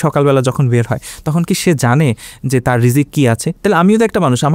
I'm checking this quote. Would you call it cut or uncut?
uncut